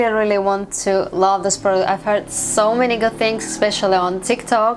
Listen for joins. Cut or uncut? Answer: uncut